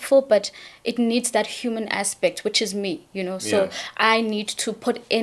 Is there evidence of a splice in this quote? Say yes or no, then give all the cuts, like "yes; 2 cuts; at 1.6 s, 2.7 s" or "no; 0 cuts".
no; 0 cuts